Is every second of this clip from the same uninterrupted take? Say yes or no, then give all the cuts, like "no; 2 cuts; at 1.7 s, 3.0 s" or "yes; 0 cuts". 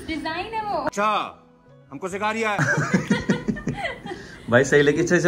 yes; 0 cuts